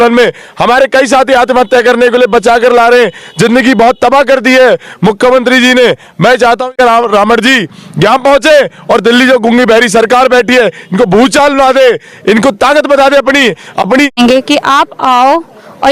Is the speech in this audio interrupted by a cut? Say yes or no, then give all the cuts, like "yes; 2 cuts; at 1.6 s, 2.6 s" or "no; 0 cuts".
yes; 2 cuts; at 6.8 s, 14.2 s